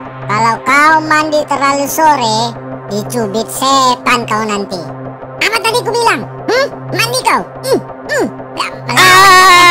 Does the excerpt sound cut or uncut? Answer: cut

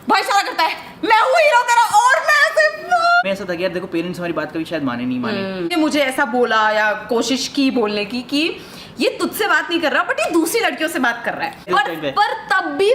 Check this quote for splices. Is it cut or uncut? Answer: cut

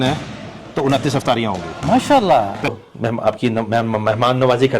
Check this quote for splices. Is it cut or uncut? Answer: cut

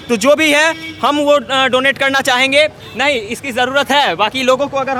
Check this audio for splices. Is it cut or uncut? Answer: uncut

